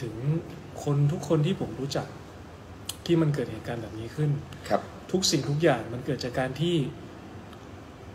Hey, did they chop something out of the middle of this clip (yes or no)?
no